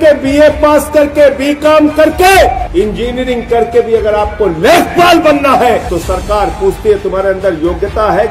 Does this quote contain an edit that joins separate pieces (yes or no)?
yes